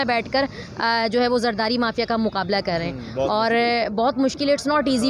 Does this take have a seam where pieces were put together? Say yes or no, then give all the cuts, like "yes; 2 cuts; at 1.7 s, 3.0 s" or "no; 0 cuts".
no; 0 cuts